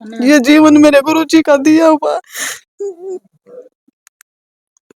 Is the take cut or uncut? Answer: uncut